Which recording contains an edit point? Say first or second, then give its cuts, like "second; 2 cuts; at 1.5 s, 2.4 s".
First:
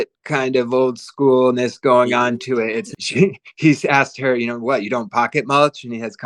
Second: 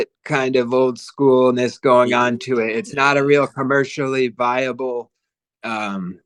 first; 1 cut; at 3.0 s